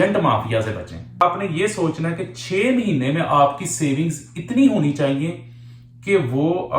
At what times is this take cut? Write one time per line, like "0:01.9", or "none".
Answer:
0:01.2